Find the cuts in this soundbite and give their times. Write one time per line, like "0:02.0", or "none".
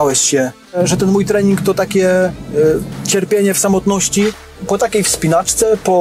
0:00.8
0:04.4